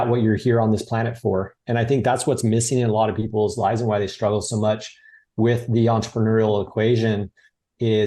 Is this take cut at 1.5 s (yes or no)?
yes